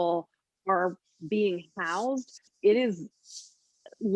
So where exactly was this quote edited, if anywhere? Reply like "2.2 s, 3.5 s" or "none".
2.5 s